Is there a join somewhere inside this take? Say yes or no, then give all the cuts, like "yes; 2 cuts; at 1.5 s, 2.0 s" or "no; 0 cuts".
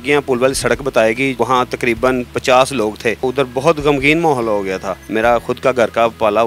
yes; 2 cuts; at 3.2 s, 5.0 s